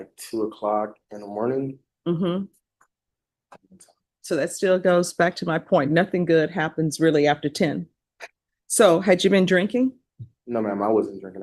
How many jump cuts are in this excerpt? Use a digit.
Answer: 0